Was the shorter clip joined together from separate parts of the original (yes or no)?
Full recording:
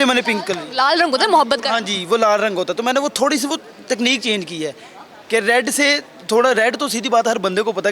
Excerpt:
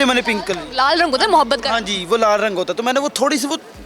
no